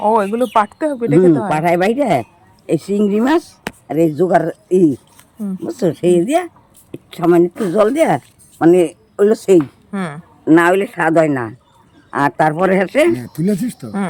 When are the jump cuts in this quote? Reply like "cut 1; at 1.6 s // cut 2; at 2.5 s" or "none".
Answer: none